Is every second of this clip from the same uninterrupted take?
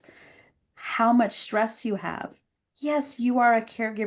yes; 0 cuts

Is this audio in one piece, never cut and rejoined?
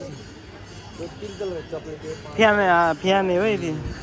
yes; 0 cuts

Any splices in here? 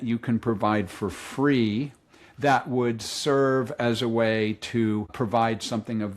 yes; 1 cut; at 5.1 s

